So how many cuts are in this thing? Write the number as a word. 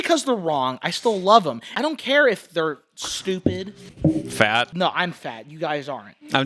three